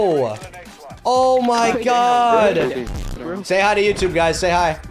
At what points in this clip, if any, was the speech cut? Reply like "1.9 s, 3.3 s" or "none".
none